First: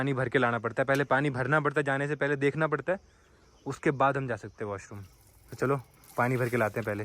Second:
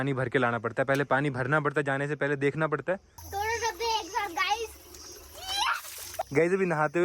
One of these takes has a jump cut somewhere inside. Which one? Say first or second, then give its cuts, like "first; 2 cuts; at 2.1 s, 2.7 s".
second; 2 cuts; at 3.2 s, 6.2 s